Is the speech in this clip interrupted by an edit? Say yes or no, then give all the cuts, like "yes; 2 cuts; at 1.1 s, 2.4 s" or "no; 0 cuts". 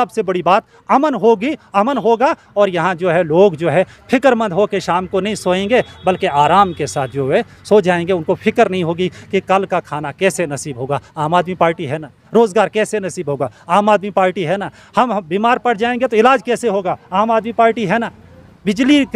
no; 0 cuts